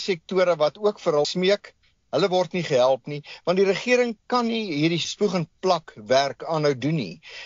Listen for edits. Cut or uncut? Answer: cut